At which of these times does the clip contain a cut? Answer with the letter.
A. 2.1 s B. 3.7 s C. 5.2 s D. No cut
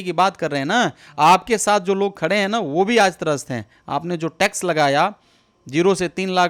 D